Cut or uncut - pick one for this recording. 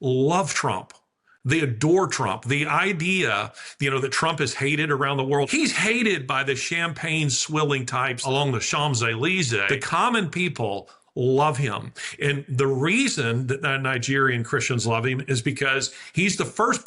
cut